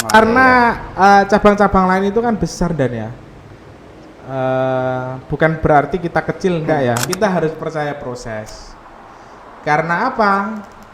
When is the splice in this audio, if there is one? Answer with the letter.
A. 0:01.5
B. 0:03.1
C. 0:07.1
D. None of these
C